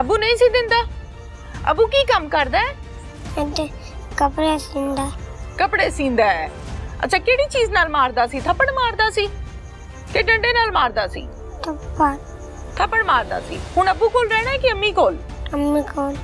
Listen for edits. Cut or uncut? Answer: uncut